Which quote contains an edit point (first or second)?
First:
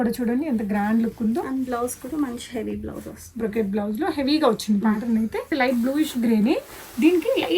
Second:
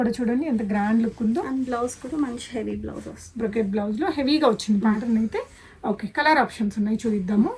first